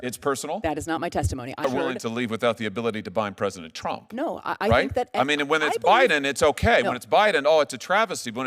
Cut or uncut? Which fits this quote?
cut